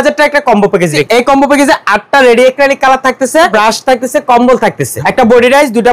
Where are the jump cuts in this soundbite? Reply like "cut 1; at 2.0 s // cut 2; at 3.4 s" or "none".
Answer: cut 1; at 1.0 s // cut 2; at 3.5 s // cut 3; at 4.9 s

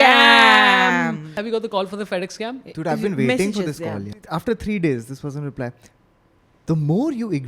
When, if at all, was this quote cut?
cut 1; at 1.4 s // cut 2; at 4.1 s

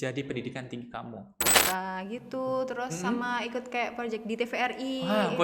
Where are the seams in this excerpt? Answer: cut 1; at 1.6 s

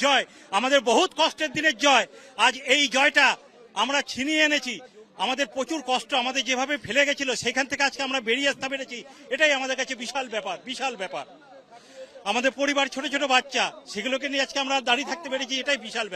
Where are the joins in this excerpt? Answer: none

